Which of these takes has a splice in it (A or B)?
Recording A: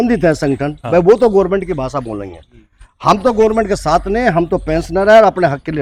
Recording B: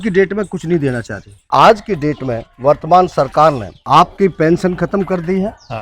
B